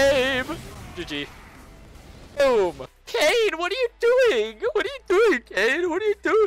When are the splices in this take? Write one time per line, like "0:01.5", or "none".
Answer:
0:02.9